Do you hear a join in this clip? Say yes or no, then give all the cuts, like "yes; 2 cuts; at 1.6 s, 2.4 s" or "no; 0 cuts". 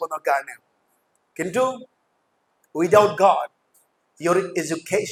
no; 0 cuts